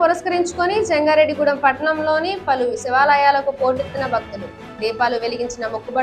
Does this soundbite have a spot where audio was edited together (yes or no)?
no